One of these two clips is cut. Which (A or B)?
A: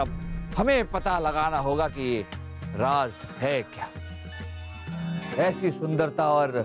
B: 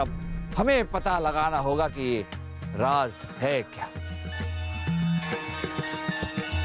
A